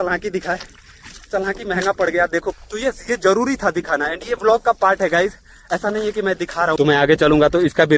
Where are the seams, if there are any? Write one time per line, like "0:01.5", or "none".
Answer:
0:02.5
0:06.8